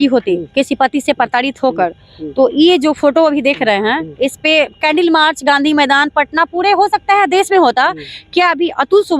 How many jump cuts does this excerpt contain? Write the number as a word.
zero